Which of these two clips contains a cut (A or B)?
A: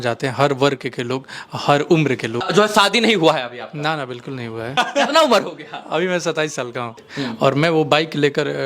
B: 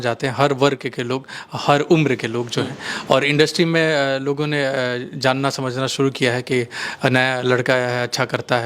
A